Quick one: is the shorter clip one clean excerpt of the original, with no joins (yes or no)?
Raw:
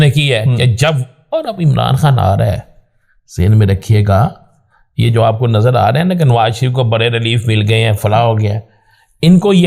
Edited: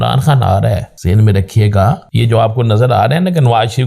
no